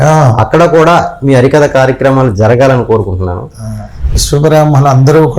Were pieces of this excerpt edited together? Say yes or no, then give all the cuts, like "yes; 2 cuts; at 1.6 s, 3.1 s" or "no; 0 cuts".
yes; 1 cut; at 4.2 s